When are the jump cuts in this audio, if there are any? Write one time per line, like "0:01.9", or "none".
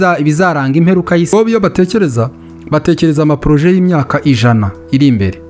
0:01.3

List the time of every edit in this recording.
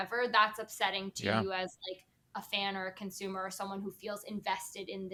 none

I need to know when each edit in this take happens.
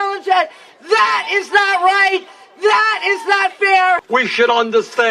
0:04.0

